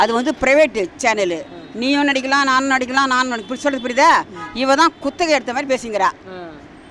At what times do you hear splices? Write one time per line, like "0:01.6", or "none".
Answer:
none